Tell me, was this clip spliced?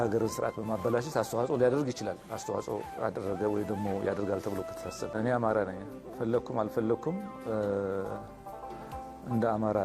yes; 1 cut; at 5.1 s

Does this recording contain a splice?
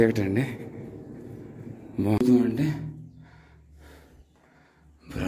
yes; 1 cut; at 2.2 s

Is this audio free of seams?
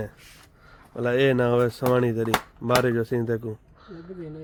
yes; 0 cuts

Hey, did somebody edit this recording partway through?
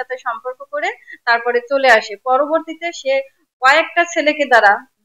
no; 0 cuts

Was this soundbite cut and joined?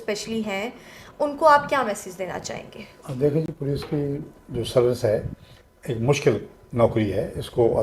no; 0 cuts

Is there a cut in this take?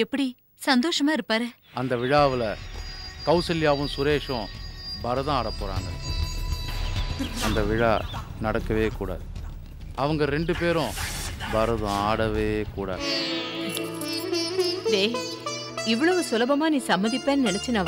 yes; 2 cuts; at 1.6 s, 13.0 s

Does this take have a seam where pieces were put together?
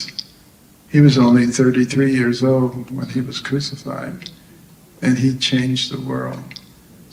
no; 0 cuts

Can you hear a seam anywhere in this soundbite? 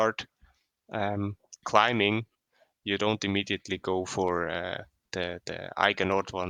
no; 0 cuts

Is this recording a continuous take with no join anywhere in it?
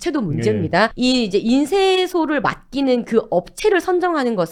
yes; 0 cuts

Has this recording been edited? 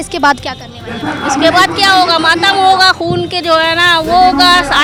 no; 0 cuts

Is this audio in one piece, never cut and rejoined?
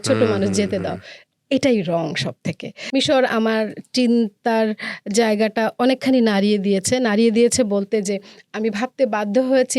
no; 1 cut; at 2.7 s

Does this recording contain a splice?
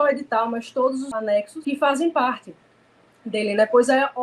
yes; 1 cut; at 1.3 s

